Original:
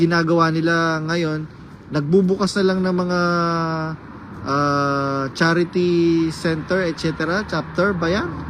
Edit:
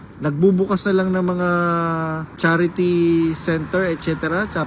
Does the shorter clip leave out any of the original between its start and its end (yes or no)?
yes